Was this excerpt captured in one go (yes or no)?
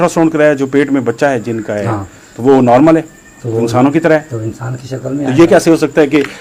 yes